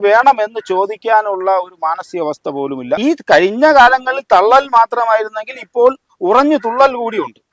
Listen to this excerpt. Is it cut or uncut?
cut